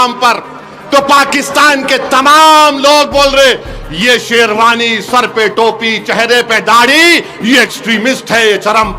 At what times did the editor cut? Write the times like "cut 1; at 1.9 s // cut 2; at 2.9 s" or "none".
none